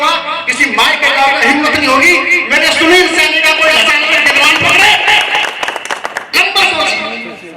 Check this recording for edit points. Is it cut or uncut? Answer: cut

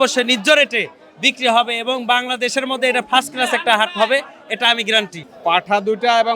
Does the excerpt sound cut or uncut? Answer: cut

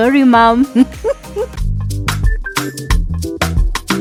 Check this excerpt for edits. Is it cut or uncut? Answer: uncut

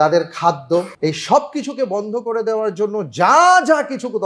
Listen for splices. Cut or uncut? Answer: cut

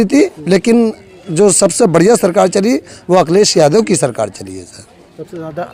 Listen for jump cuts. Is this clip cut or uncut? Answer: uncut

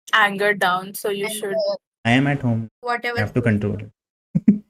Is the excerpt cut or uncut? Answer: cut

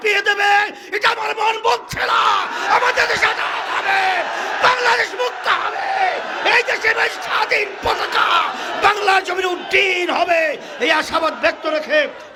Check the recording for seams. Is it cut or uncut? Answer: uncut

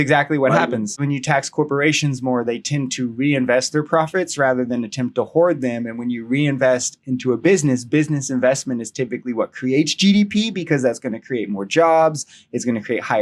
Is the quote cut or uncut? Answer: cut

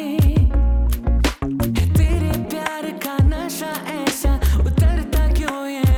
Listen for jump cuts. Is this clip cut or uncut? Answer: uncut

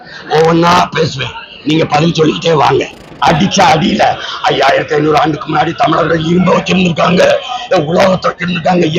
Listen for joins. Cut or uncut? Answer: cut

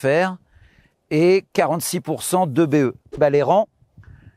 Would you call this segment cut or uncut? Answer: cut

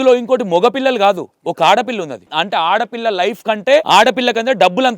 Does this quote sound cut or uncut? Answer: cut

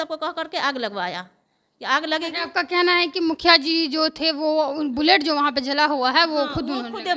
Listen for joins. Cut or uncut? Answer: uncut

